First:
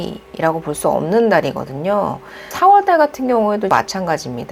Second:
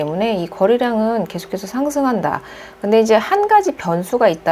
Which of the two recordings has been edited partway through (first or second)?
first